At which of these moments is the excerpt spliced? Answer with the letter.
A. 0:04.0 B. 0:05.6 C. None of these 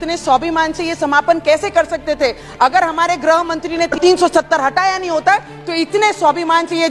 A